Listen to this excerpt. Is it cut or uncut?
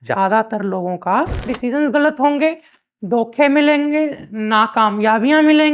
cut